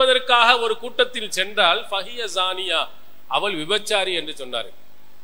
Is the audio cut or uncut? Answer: uncut